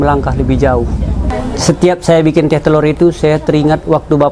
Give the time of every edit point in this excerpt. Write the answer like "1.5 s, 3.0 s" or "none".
1.3 s